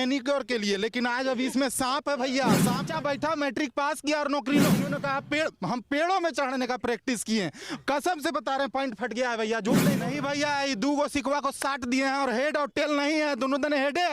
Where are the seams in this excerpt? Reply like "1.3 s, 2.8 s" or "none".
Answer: 2.9 s, 4.9 s, 10.1 s